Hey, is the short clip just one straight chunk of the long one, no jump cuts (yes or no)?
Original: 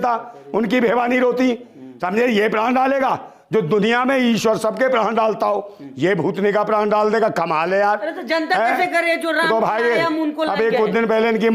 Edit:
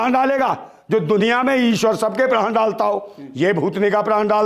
yes